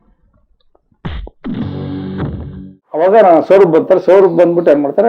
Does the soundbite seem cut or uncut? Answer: cut